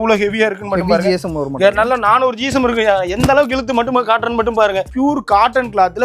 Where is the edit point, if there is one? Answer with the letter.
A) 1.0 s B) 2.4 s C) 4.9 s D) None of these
C